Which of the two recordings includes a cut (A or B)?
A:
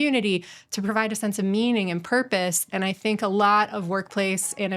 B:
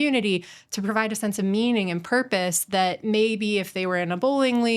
A